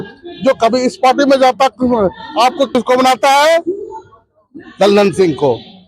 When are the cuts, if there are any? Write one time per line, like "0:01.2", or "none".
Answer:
0:02.7